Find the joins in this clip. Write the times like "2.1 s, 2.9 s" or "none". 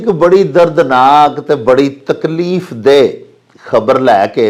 none